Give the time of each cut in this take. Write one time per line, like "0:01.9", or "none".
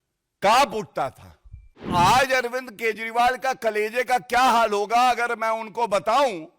0:01.9